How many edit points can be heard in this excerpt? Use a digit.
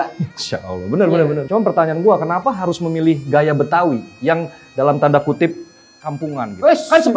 1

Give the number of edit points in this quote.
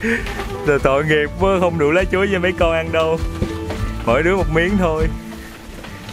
0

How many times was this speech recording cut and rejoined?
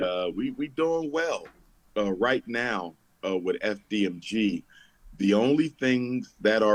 0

